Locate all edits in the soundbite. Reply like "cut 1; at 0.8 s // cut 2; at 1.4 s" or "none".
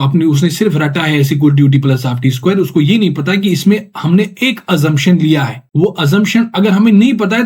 cut 1; at 5.6 s